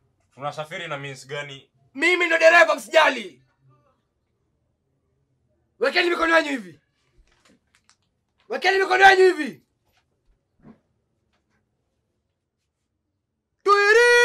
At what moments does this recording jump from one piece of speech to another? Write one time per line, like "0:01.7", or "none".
none